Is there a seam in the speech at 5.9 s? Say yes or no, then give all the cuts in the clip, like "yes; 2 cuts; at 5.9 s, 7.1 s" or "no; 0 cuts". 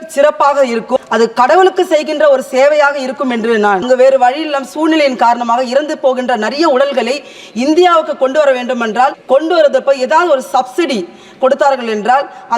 no; 3 cuts; at 1.1 s, 3.8 s, 9.2 s